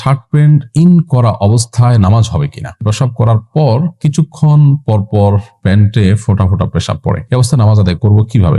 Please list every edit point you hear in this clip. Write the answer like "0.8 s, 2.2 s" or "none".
2.9 s, 7.2 s